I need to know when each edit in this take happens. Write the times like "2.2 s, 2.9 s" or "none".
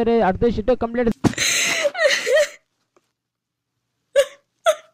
1.1 s

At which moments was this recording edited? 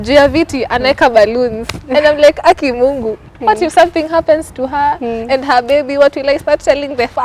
none

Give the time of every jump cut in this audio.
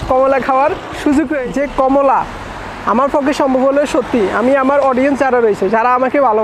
1.4 s

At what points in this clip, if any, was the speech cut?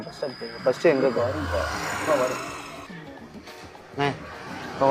none

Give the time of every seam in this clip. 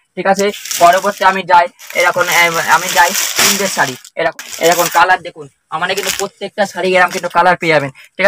4.4 s

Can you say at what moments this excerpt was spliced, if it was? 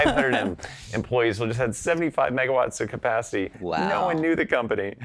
none

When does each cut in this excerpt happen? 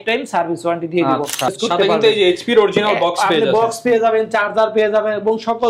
1.5 s

